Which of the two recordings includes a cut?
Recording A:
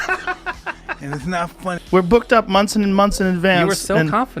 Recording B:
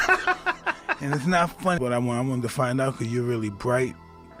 A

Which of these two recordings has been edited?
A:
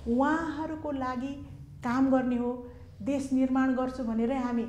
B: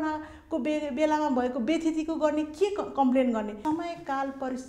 B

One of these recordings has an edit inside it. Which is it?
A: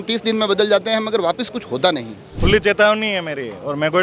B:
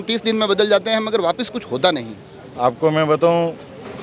A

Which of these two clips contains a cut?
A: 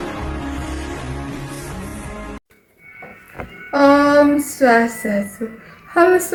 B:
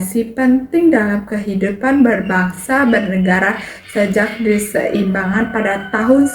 B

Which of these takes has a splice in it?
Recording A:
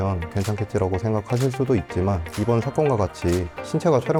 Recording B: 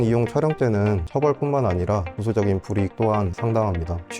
B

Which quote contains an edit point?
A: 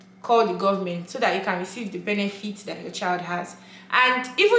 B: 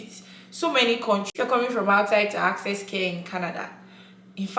B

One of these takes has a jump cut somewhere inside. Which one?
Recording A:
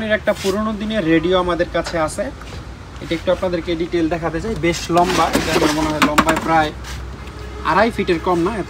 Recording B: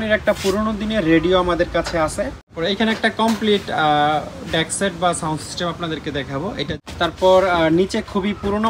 B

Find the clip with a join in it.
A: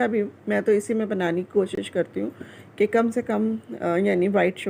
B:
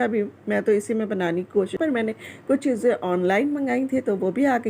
B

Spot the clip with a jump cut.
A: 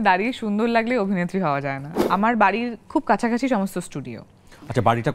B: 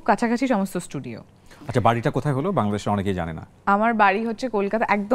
A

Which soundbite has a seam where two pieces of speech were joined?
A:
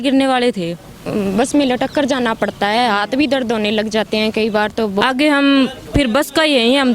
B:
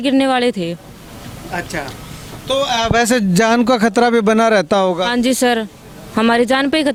A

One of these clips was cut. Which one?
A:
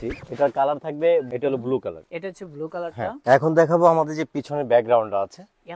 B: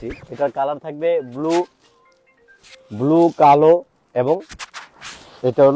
A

